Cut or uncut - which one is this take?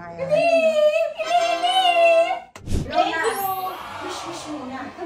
cut